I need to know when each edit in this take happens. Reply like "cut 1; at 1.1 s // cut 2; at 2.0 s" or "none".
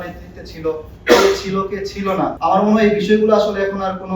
cut 1; at 2.3 s